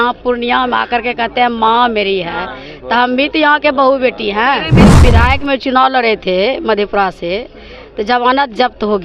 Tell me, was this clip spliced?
yes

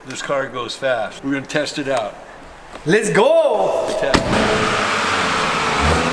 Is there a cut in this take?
no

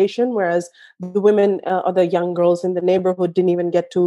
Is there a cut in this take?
no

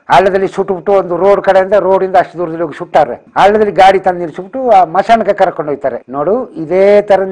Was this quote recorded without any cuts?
no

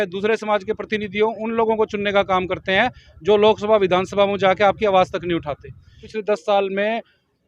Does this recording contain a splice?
yes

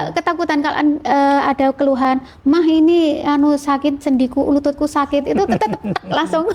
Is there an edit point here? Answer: no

